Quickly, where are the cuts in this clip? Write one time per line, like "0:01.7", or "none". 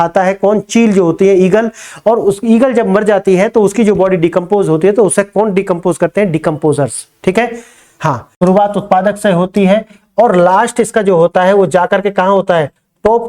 0:08.3